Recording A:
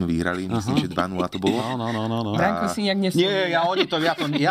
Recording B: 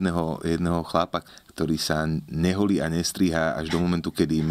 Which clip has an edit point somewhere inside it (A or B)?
B